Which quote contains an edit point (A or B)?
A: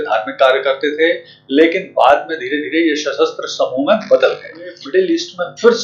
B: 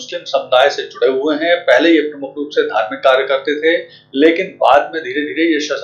A